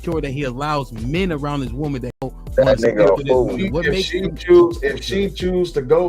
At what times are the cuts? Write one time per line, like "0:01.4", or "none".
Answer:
0:02.2